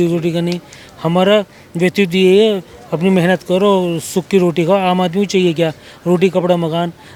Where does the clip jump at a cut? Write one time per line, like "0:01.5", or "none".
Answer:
none